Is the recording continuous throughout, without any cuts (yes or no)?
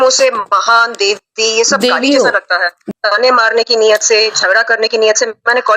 no